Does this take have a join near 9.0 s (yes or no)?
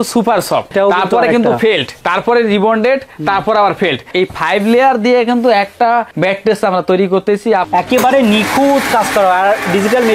no